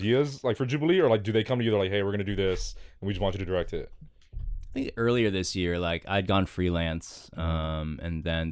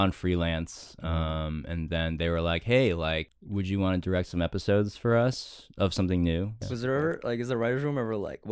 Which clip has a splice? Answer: second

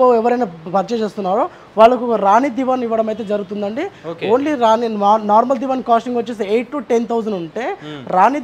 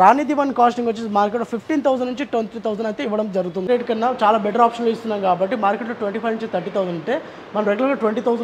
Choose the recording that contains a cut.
second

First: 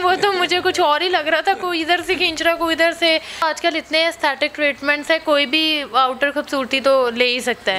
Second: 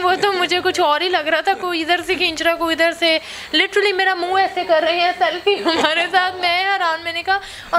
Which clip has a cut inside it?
first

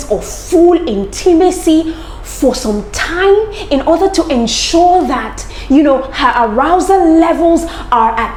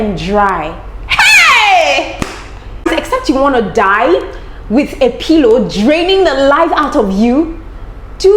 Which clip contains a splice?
second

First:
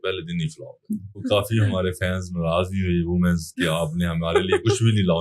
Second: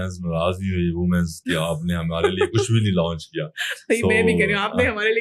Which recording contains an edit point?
first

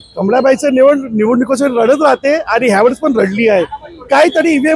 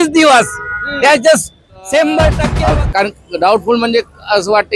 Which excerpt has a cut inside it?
second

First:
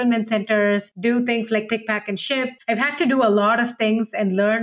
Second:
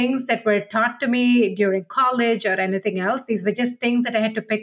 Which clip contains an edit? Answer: first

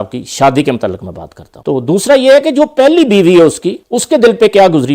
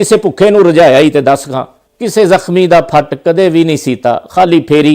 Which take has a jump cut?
first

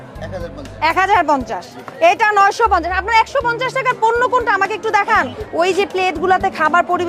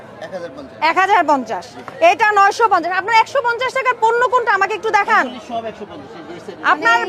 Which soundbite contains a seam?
first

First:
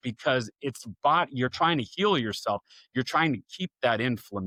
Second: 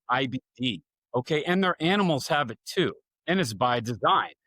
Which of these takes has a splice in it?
second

